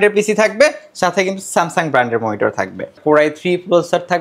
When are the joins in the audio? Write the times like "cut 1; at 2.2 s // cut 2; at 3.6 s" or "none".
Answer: cut 1; at 3.0 s